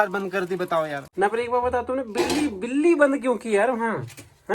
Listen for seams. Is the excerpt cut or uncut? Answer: cut